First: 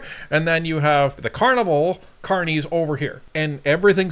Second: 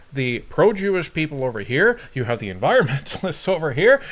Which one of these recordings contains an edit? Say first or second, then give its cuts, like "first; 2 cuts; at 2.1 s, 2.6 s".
first; 2 cuts; at 1.3 s, 3.2 s